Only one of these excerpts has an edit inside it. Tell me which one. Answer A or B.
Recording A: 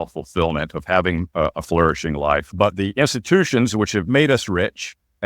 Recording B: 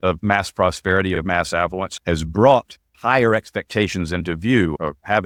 A